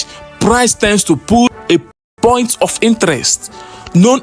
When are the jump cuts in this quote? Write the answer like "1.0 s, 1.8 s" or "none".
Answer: 1.6 s